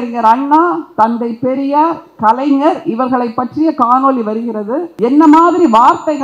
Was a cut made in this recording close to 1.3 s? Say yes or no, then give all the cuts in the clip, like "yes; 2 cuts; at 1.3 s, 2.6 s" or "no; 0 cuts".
no; 1 cut; at 4.9 s